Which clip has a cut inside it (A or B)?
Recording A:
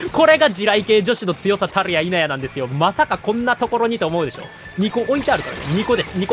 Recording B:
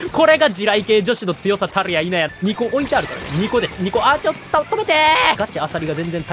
B